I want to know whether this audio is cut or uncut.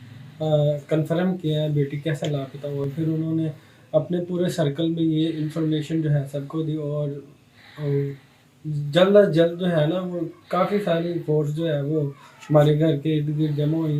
uncut